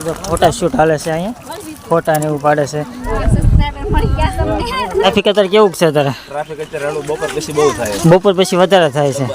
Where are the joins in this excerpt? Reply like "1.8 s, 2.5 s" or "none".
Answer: 3.1 s, 5.1 s